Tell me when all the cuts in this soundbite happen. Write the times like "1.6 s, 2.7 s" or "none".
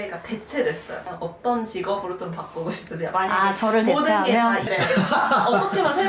1.0 s, 4.7 s